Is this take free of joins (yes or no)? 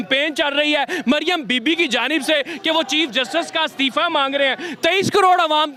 yes